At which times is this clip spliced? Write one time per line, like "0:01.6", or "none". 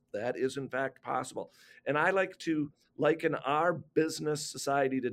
none